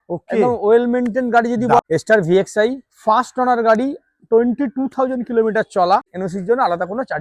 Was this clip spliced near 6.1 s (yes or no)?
yes